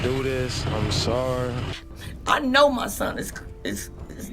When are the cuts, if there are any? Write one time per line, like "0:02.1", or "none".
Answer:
0:01.8